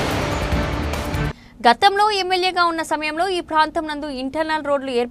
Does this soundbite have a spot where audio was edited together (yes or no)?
yes